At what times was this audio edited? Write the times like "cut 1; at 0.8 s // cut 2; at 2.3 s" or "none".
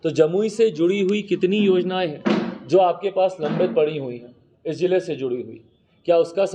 none